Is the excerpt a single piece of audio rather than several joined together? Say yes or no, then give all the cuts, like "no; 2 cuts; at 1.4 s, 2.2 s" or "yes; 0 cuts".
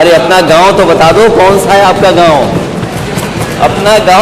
no; 1 cut; at 2.9 s